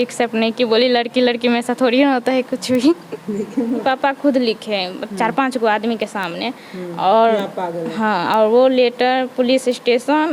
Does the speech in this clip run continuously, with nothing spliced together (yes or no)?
no